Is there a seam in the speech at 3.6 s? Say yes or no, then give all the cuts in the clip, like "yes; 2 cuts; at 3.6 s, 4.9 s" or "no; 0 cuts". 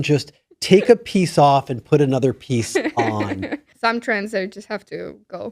yes; 1 cut; at 3.6 s